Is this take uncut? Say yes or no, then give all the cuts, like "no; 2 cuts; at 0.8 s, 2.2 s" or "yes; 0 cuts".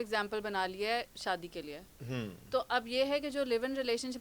yes; 0 cuts